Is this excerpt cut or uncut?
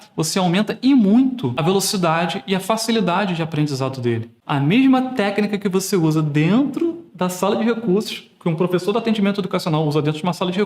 cut